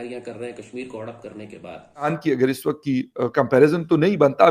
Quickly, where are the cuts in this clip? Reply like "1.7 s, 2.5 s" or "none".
2.1 s

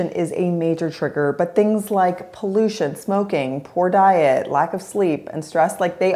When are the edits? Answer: none

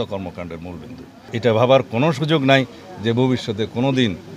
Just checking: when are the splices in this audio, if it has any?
1.3 s

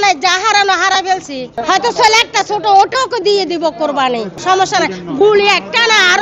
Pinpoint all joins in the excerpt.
1.6 s, 4.3 s

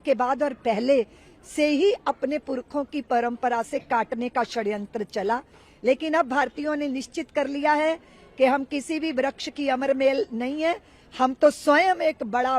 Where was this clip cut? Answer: none

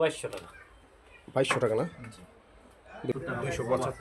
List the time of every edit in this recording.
3.1 s

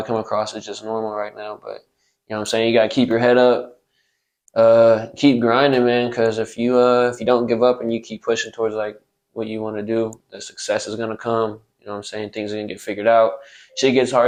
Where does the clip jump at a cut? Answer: none

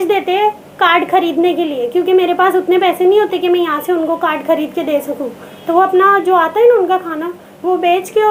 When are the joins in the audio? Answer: none

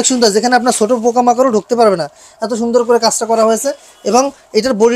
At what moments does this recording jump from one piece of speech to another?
none

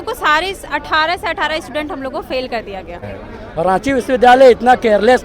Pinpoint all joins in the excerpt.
3.1 s

